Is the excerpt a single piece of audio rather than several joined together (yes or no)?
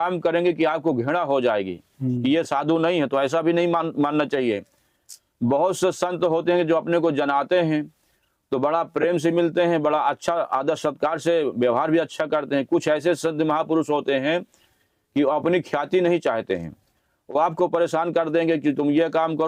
yes